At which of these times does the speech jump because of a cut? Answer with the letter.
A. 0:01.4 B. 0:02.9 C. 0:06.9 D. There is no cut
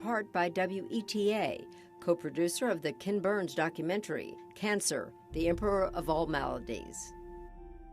C